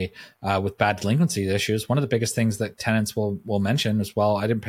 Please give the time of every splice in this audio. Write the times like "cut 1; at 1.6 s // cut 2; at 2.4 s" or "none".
none